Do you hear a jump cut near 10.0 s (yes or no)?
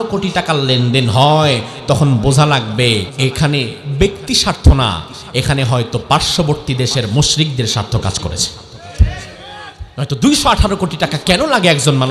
no